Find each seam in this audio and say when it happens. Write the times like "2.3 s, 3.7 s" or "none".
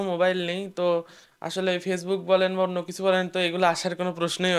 none